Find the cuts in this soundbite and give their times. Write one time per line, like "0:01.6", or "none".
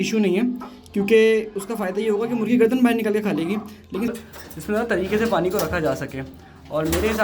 0:04.1